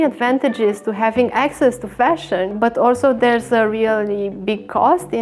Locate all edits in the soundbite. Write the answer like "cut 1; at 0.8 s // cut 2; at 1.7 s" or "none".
cut 1; at 2.5 s

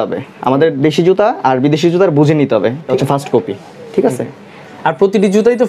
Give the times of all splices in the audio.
cut 1; at 2.9 s

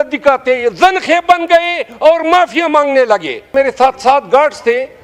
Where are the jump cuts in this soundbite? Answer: cut 1; at 3.5 s

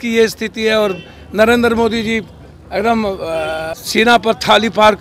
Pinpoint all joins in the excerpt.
cut 1; at 3.7 s

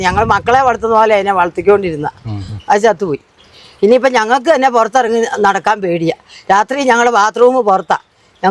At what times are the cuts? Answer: none

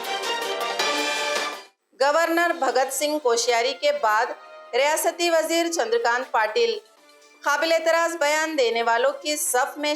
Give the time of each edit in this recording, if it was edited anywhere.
cut 1; at 1.5 s

